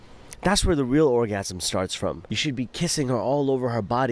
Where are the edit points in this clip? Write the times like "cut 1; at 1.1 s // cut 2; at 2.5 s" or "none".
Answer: cut 1; at 2.3 s